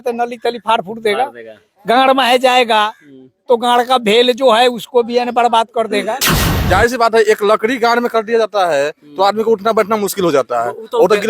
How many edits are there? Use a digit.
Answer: 1